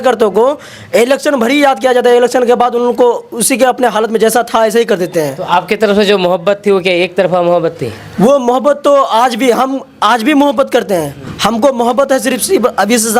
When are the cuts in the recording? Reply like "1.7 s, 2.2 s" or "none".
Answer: none